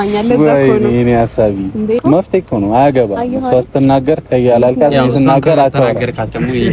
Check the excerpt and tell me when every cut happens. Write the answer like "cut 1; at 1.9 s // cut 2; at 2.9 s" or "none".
cut 1; at 2.0 s